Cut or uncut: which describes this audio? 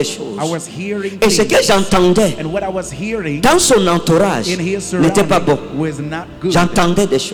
uncut